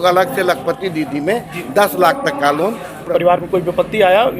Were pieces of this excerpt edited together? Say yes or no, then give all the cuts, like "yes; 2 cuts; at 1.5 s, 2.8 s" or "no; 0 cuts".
yes; 1 cut; at 2.9 s